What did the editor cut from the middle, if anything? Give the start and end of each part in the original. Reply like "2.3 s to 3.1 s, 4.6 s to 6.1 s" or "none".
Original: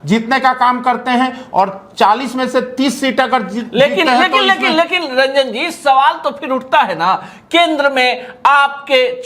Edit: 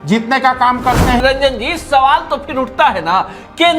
1.2 s to 5.1 s